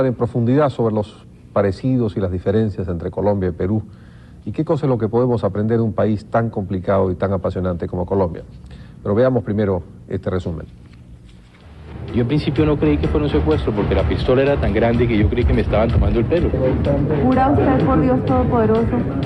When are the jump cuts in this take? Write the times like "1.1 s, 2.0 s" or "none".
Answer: 6.2 s